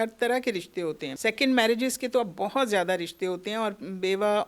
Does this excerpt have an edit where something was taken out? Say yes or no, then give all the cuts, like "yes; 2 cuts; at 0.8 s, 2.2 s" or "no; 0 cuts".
yes; 1 cut; at 1.1 s